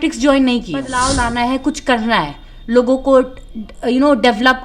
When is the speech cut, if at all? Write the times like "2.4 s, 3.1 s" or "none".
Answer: 1.0 s